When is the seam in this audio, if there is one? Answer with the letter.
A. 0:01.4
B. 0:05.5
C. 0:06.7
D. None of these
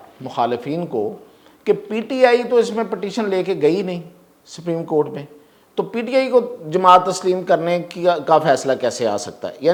D